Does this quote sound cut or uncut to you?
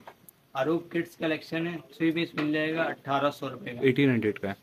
uncut